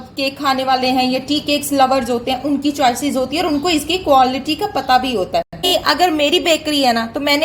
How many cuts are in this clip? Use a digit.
1